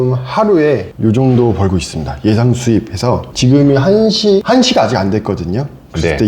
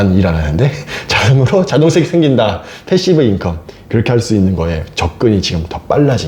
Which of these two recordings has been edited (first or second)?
first